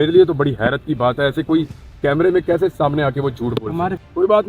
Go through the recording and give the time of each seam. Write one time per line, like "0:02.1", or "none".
none